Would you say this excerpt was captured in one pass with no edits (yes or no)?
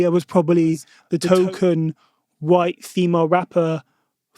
no